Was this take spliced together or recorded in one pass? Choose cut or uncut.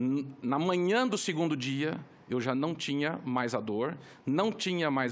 uncut